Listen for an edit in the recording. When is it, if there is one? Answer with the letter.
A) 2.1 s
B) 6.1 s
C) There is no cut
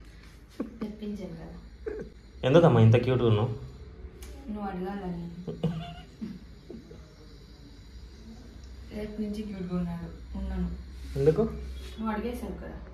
A